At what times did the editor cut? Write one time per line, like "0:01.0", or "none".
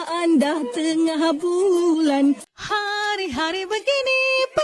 0:02.5